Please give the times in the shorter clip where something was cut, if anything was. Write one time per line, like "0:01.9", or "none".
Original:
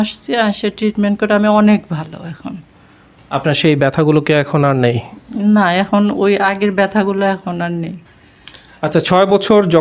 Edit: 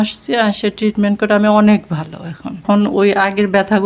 0:02.6